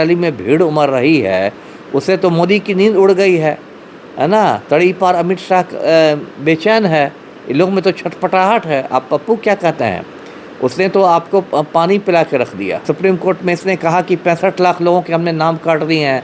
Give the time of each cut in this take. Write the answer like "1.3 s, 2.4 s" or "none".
12.8 s

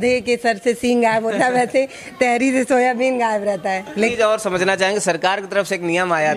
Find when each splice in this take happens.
4.0 s

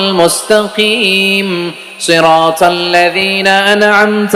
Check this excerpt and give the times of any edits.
none

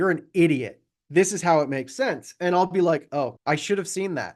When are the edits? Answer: 3.4 s

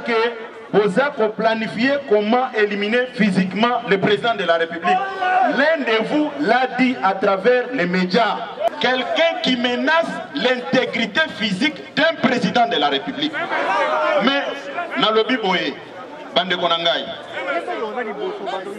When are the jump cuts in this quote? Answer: 8.7 s

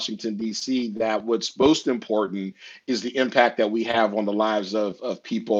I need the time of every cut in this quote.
none

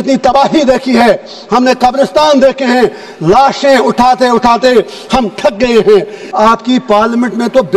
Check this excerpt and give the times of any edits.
6.2 s

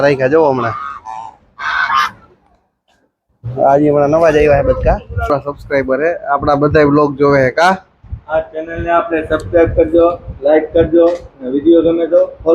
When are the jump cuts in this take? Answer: 5.1 s

